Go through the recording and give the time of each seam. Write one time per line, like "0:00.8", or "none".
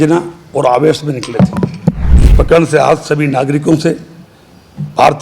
0:02.1